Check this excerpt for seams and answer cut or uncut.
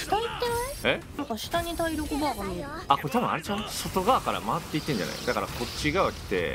cut